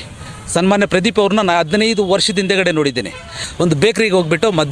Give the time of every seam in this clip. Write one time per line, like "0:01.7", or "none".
0:03.4